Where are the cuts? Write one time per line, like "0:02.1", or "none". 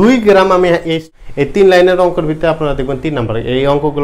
0:01.0